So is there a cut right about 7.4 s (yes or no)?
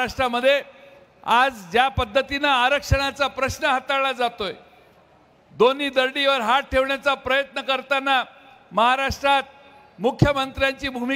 no